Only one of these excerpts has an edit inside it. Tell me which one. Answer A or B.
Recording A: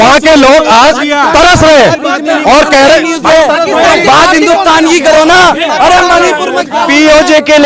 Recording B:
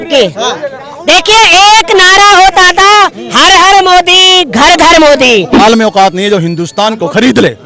B